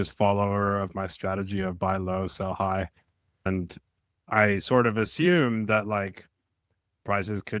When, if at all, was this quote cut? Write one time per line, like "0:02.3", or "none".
0:03.5